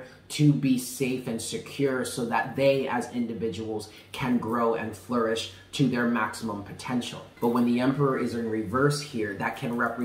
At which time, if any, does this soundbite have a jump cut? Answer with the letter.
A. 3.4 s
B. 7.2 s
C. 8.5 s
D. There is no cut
B